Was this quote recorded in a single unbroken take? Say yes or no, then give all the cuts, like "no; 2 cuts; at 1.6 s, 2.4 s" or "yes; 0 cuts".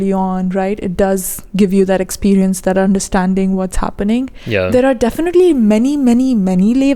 yes; 0 cuts